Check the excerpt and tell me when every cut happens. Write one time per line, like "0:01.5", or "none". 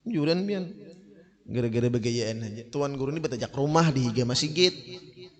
0:02.5

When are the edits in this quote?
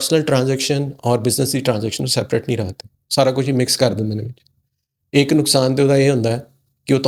none

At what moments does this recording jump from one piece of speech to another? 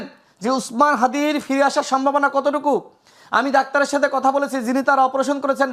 none

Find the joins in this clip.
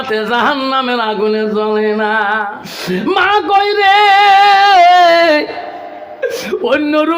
0:02.6

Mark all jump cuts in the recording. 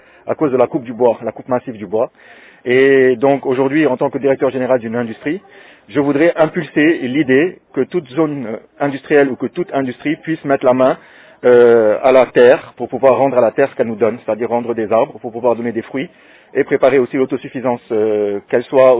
none

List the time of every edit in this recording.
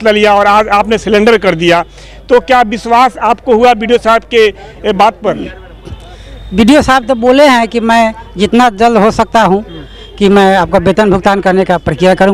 none

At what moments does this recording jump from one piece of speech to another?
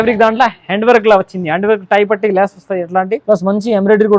0:03.2

